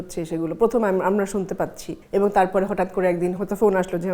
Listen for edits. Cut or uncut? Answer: uncut